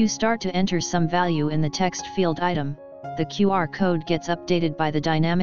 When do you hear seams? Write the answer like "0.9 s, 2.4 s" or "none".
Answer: none